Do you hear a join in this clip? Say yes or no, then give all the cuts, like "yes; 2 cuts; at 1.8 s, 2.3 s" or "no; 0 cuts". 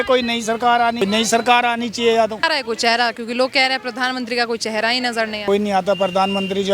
yes; 3 cuts; at 1.0 s, 2.4 s, 5.5 s